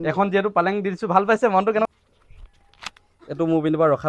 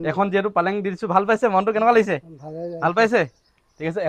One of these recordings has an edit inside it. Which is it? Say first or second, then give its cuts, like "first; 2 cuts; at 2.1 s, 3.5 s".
first; 1 cut; at 1.9 s